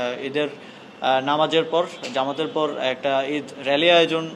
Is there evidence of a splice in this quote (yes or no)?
no